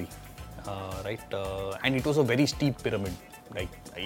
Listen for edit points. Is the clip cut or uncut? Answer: cut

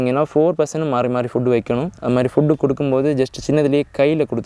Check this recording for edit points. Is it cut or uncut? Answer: uncut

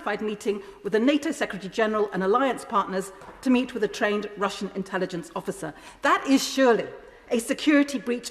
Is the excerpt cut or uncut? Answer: uncut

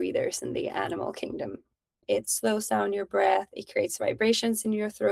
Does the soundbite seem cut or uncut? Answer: cut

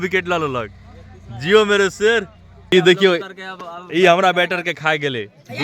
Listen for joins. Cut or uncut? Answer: cut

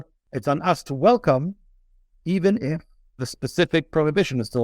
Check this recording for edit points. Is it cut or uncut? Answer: cut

